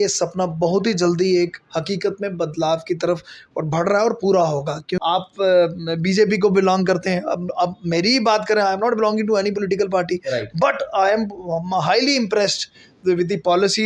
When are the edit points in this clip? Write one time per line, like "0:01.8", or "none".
0:04.9